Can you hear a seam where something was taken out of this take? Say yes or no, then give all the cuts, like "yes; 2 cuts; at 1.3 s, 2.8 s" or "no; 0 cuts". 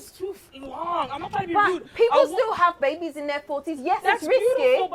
no; 0 cuts